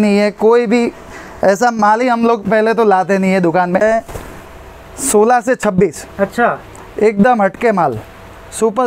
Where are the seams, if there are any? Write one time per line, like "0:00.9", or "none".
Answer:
0:03.8